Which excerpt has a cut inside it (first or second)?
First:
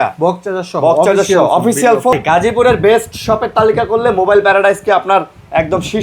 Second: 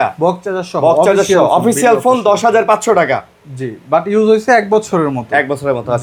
first